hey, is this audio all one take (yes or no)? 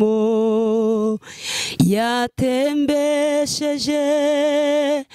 yes